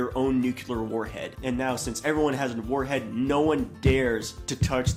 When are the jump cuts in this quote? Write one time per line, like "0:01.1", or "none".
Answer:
none